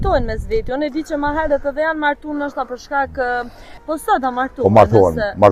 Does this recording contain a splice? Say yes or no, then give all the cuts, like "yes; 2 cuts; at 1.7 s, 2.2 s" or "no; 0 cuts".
yes; 1 cut; at 3.7 s